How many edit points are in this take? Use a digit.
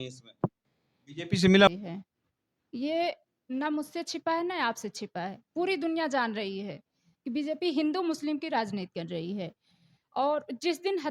1